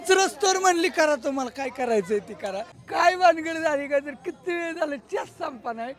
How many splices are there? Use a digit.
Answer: 1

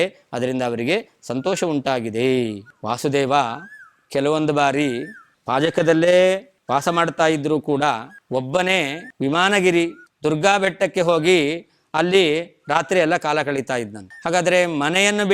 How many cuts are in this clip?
1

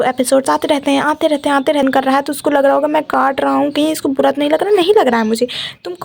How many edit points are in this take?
1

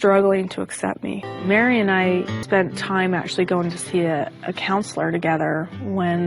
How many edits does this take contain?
2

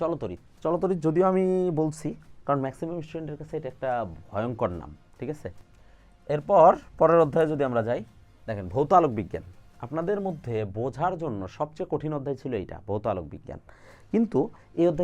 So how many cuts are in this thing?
1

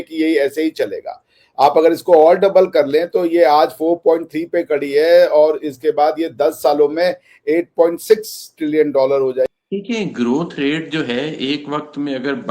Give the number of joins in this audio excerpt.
1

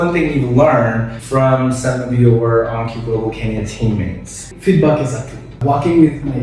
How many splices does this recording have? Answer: 3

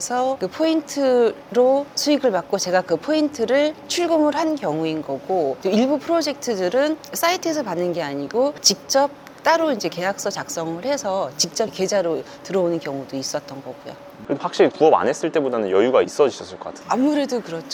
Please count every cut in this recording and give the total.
0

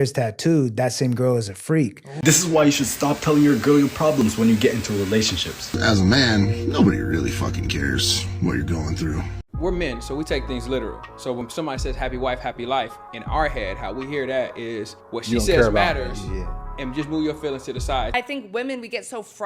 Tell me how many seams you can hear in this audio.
4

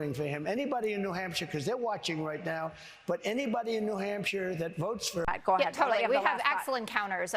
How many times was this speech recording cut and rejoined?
1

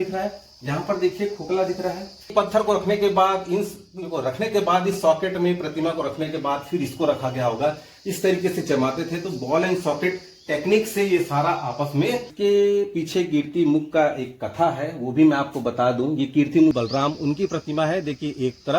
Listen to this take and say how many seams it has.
3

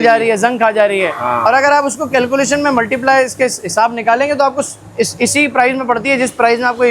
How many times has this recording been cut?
0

